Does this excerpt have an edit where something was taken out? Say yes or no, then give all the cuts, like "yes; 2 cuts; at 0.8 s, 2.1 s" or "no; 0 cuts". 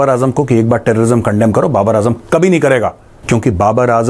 yes; 1 cut; at 3.1 s